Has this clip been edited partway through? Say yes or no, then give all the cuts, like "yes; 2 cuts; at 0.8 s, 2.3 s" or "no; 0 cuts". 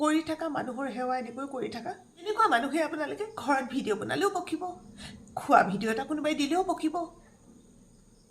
yes; 1 cut; at 2.3 s